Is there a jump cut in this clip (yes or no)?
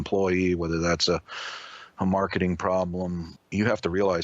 yes